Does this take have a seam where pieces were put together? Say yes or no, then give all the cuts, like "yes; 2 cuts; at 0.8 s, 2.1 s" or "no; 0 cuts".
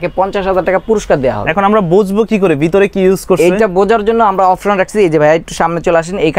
no; 0 cuts